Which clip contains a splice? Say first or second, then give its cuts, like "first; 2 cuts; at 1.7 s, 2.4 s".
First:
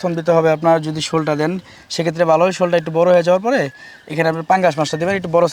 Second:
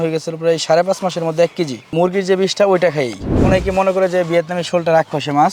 second; 2 cuts; at 1.9 s, 3.4 s